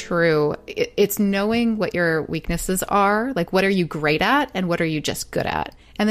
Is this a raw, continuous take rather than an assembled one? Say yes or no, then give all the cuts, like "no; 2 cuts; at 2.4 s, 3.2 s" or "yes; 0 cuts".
yes; 0 cuts